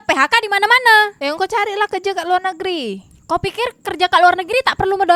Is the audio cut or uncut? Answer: uncut